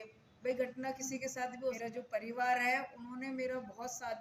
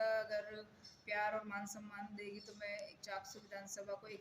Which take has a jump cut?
first; 1 cut; at 1.8 s

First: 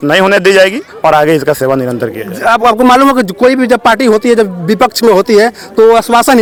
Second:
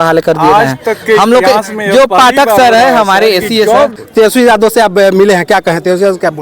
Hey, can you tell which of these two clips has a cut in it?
second; 1 cut; at 3.9 s

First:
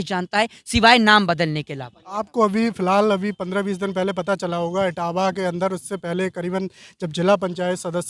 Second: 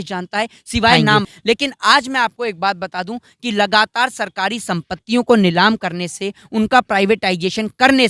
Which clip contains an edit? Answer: second; 1 cut; at 1.2 s

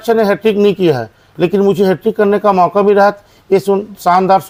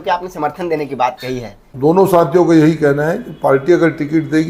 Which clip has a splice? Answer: second; 1 cut; at 1.7 s

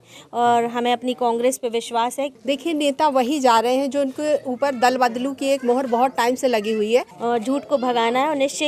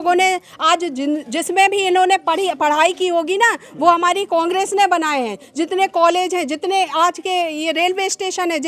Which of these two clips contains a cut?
first; 2 cuts; at 2.3 s, 7.1 s

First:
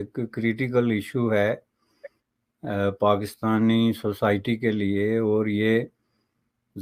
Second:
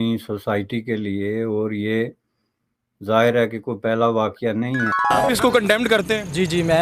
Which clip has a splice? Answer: second; 1 cut; at 5.0 s

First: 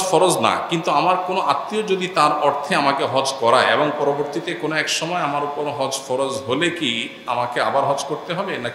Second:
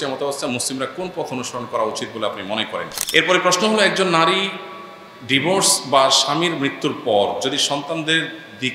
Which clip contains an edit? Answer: second; 1 cut; at 3.0 s

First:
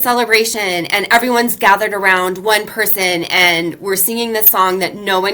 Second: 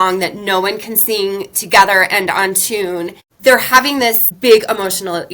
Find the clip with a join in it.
second; 2 cuts; at 3.2 s, 4.3 s

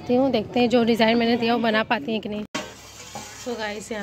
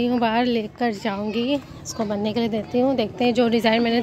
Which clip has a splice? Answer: first; 1 cut; at 2.5 s

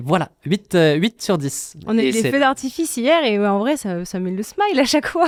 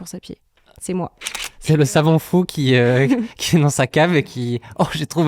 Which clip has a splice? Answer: second; 1 cut; at 1.2 s

